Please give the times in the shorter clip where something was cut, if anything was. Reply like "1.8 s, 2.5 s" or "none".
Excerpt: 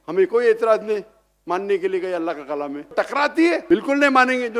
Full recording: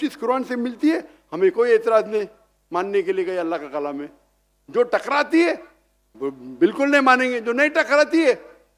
2.9 s, 3.6 s